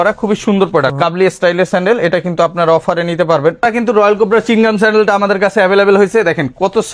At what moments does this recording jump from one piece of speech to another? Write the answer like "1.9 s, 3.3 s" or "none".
0.9 s, 3.8 s